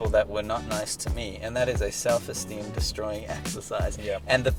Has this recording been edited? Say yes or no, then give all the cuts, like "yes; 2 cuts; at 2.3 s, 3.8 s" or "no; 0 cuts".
no; 0 cuts